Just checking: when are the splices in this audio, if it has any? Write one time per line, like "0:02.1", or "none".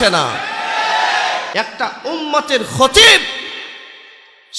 0:01.4